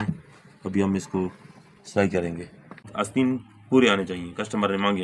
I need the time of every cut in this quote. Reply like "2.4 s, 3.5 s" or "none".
2.9 s

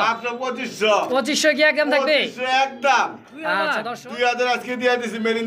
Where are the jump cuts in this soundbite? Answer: 3.7 s

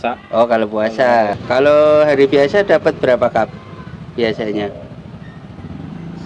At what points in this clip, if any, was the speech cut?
1.4 s

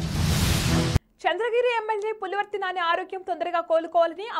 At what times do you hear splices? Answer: 1.0 s

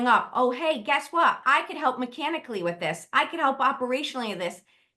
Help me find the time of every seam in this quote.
1.4 s

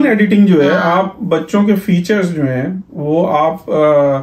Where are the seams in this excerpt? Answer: none

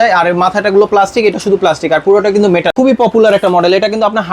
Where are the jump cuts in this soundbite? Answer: 2.7 s

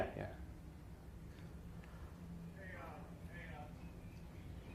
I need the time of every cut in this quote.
none

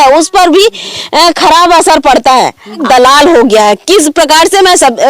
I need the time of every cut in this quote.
2.8 s

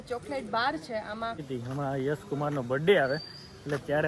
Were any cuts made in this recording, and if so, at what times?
1.4 s

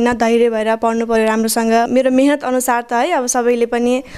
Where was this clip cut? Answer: 1.9 s

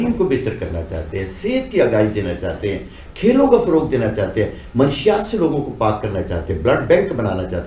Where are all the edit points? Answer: none

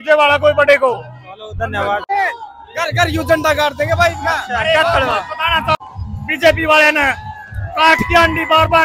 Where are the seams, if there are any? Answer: 2.1 s, 5.8 s

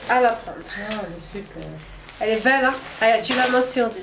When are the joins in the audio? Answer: none

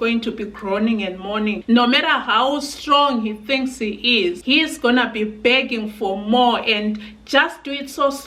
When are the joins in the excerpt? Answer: 4.4 s

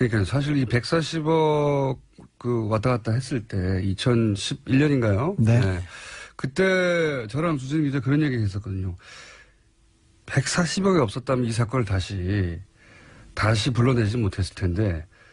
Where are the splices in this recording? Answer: 2.7 s

